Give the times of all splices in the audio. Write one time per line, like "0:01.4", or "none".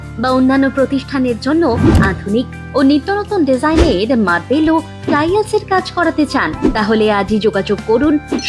none